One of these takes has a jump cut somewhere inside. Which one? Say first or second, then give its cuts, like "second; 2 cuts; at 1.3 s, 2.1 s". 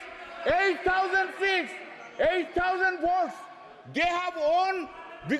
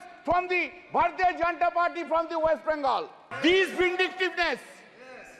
second; 1 cut; at 3.2 s